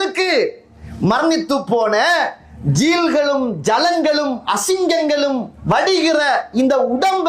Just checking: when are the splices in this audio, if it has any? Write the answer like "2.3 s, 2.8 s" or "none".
none